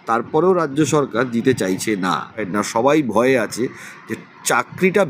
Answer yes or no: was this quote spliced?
yes